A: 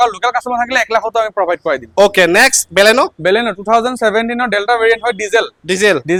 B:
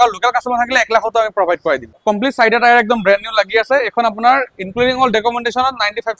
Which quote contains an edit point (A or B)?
B